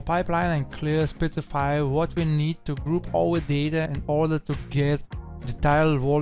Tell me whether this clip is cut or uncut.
cut